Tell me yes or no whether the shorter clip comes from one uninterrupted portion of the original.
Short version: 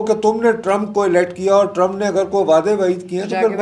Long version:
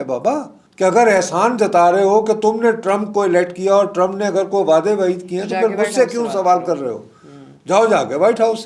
yes